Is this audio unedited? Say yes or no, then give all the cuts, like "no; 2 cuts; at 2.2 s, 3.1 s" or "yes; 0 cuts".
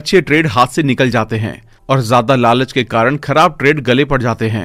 yes; 0 cuts